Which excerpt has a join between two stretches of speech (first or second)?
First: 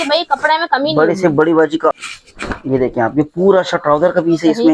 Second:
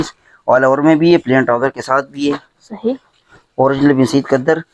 first